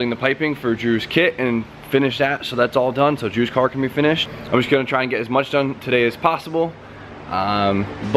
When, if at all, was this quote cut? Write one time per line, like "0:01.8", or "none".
0:02.3